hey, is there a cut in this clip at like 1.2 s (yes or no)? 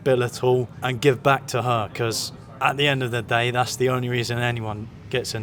no